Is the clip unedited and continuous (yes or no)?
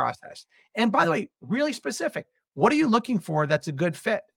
yes